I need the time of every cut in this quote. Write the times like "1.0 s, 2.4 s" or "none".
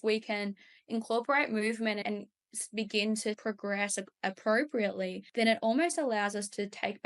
5.2 s